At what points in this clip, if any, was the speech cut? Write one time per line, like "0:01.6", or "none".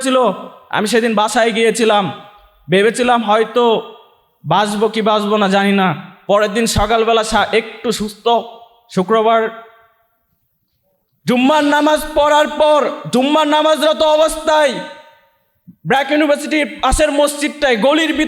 none